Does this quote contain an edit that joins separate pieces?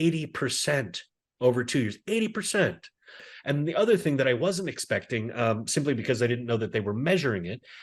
yes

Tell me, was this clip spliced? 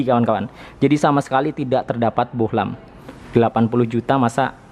no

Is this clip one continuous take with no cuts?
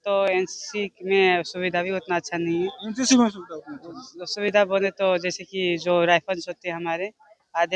yes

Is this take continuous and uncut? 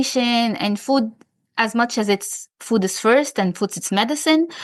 yes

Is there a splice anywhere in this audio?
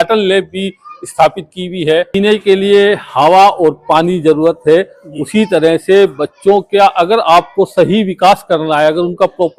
yes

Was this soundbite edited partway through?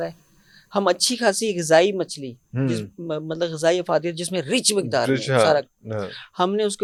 no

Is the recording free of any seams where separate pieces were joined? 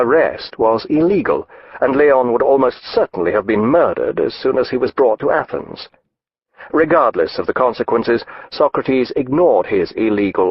yes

